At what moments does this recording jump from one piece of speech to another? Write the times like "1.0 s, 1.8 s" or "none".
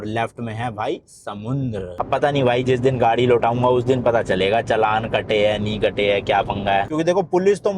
1.9 s